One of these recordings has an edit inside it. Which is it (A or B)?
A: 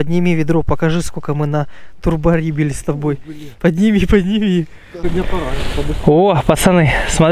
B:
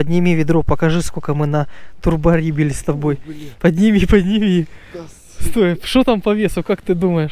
A